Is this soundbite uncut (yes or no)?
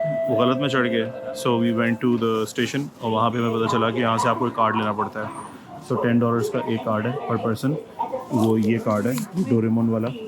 yes